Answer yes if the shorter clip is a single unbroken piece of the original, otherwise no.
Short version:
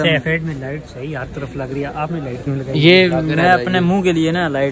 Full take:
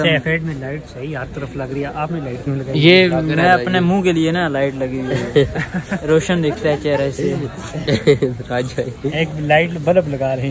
yes